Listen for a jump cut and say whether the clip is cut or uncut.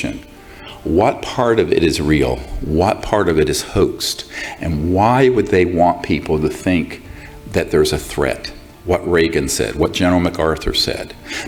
uncut